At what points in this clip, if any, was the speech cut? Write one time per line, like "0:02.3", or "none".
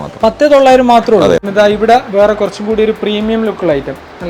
0:01.4